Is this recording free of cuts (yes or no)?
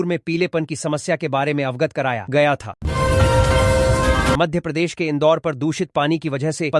yes